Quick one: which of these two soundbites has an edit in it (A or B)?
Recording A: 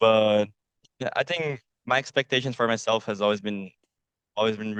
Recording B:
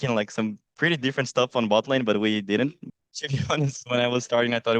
B